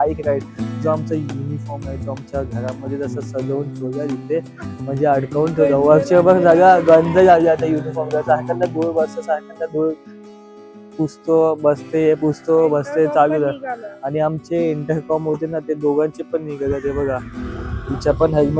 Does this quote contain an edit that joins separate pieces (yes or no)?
no